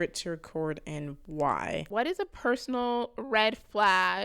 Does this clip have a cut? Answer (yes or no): yes